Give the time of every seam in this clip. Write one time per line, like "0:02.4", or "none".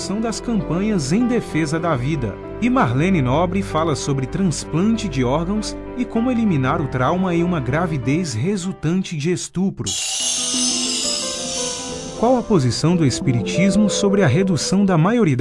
none